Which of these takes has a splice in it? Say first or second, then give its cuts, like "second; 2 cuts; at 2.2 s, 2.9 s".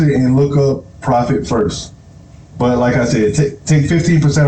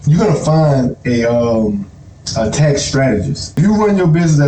second; 1 cut; at 3.6 s